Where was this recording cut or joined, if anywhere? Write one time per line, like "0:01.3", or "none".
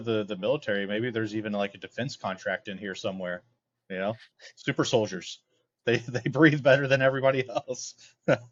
none